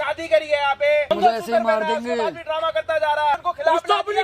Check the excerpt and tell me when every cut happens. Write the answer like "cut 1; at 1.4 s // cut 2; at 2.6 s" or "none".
cut 1; at 1.1 s // cut 2; at 3.5 s